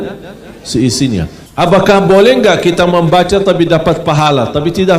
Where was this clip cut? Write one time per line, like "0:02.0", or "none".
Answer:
0:01.4